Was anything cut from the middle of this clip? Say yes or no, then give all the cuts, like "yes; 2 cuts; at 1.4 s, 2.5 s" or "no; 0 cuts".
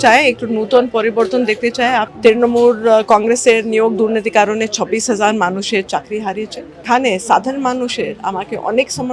yes; 2 cuts; at 2.1 s, 6.8 s